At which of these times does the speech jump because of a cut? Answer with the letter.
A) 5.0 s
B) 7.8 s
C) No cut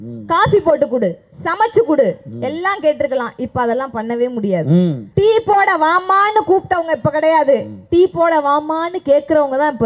A